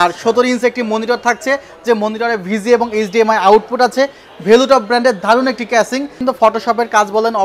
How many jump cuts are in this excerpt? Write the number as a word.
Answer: one